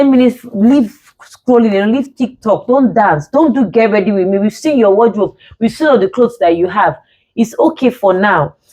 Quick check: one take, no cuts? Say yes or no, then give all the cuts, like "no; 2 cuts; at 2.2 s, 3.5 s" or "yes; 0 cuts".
yes; 0 cuts